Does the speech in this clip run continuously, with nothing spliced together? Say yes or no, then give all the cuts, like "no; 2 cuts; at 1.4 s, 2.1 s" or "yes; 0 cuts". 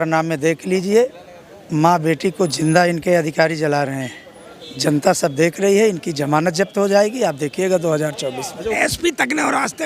no; 1 cut; at 8.8 s